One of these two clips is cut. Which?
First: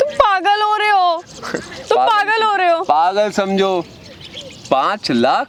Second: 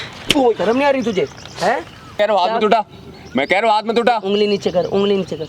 second; 1 cut; at 2.2 s

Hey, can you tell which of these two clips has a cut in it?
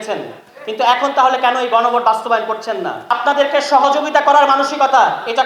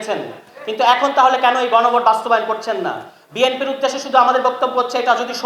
first; 1 cut; at 3.1 s

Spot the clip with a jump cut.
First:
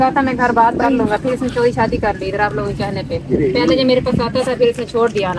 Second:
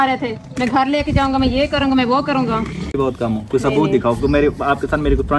second; 1 cut; at 2.9 s

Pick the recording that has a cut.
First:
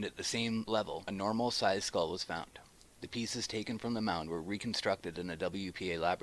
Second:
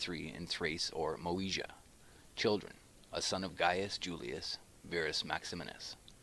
first; 1 cut; at 5.3 s

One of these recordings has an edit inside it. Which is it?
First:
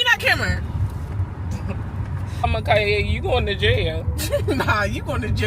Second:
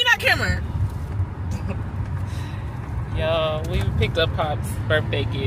first; 1 cut; at 2.4 s

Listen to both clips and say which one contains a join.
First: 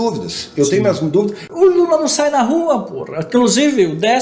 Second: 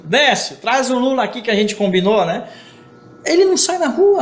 first; 1 cut; at 1.4 s

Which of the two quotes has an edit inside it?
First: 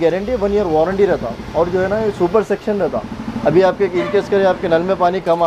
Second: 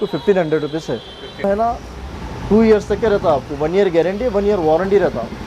second; 1 cut; at 1.4 s

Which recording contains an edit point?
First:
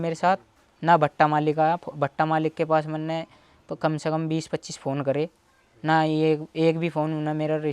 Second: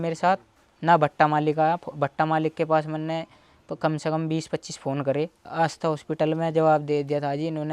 second; 1 cut; at 5.5 s

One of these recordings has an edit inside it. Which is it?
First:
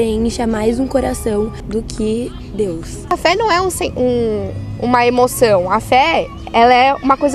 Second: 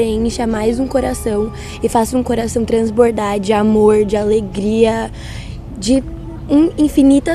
first; 2 cuts; at 1.6 s, 3.1 s

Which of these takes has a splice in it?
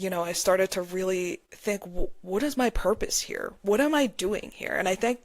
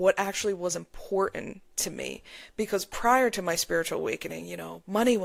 first; 1 cut; at 1.5 s

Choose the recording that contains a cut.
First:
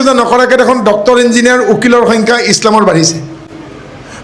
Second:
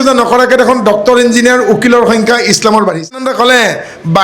second; 1 cut; at 3.3 s

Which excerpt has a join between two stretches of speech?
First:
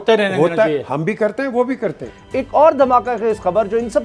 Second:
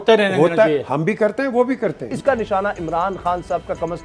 second; 1 cut; at 2.1 s

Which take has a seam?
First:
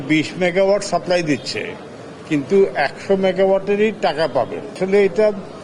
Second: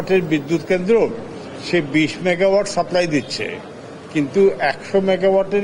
first; 1 cut; at 4.7 s

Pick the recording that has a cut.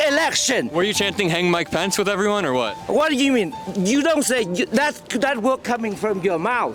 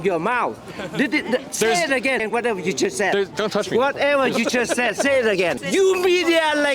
second; 2 cuts; at 2.2 s, 5.6 s

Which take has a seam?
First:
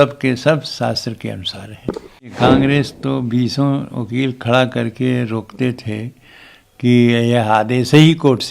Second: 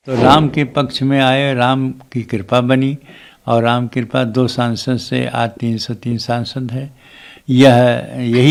first; 1 cut; at 2.3 s

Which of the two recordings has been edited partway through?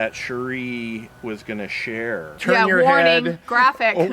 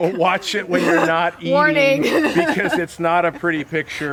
first; 1 cut; at 2.4 s

